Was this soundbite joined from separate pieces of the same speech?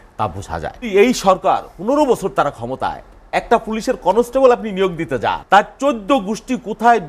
yes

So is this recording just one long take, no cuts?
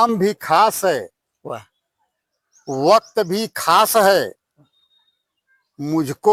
yes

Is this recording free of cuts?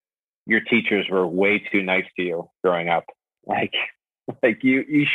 yes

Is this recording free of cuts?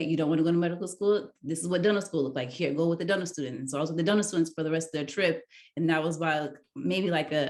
yes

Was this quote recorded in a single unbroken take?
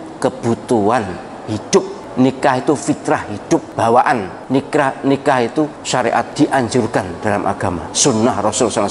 no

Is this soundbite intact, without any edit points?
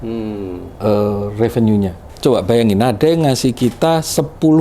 no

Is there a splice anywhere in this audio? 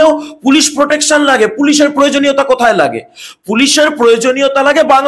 no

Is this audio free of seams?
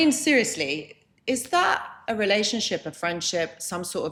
yes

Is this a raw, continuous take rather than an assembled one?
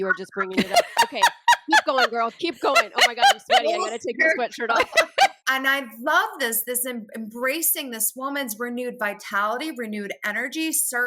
no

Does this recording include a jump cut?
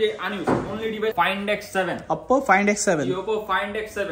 yes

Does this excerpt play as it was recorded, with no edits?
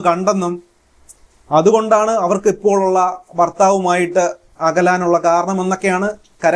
yes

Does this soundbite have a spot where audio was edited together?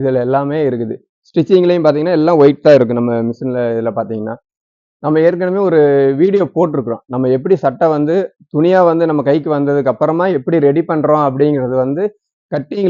no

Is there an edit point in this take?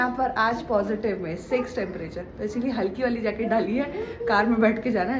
no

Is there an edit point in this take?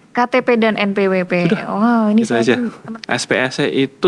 yes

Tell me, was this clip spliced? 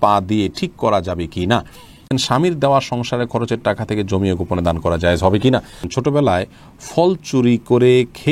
yes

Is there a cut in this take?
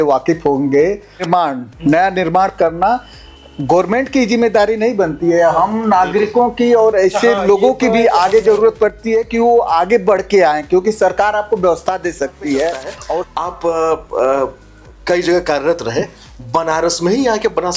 yes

